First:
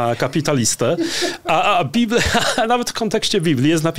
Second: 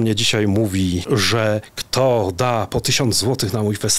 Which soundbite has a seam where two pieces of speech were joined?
second; 1 cut; at 1.4 s

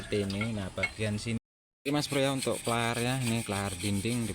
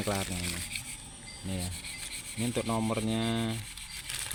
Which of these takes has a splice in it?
first; 1 cut; at 1.4 s

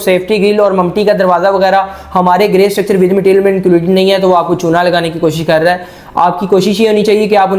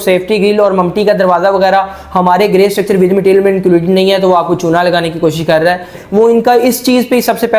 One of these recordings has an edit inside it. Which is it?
second; 1 cut; at 6.0 s

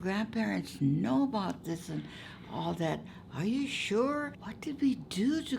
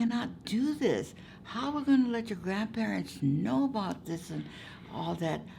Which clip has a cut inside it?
first; 1 cut; at 4.4 s

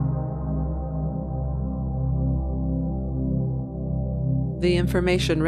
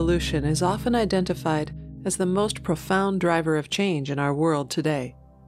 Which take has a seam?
second; 1 cut; at 2.5 s

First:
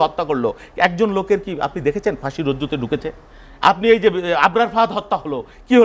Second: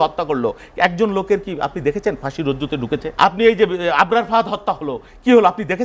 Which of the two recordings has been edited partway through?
second; 1 cut; at 3.1 s

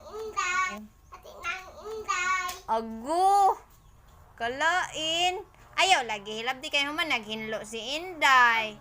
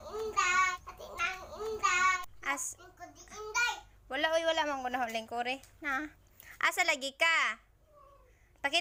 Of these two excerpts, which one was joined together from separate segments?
first; 2 cuts; at 0.8 s, 2.5 s

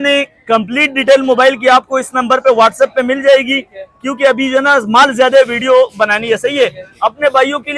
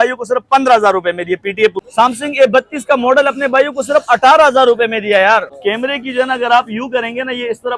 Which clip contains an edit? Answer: second; 2 cuts; at 1.8 s, 5.5 s

